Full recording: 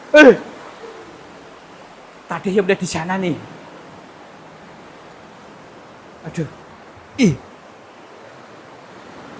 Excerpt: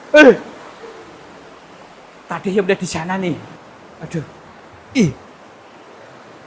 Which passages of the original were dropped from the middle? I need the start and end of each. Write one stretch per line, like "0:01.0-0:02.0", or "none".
0:03.6-0:05.8